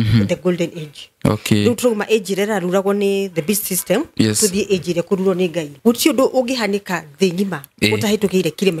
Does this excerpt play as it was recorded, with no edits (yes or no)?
no